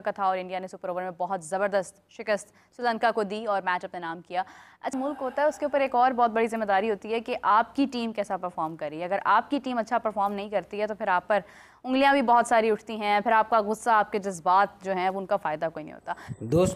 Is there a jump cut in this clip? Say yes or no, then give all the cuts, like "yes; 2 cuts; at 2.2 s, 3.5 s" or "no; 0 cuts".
no; 0 cuts